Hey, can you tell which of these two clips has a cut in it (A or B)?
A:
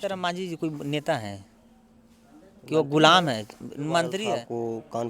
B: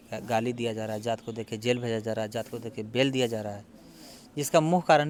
A